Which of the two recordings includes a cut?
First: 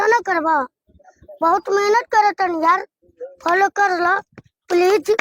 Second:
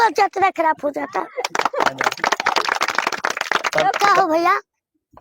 second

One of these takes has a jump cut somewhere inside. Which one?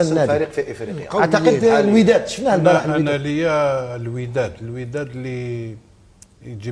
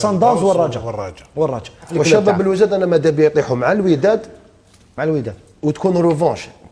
second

